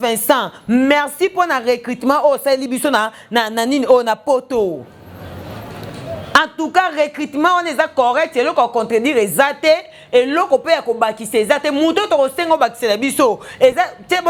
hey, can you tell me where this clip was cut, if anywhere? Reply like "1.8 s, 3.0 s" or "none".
none